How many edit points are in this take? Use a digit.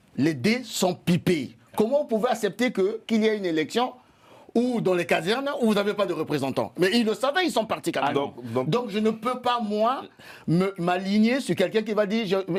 0